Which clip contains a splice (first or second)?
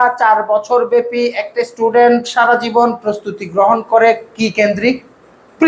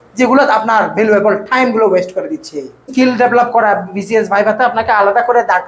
second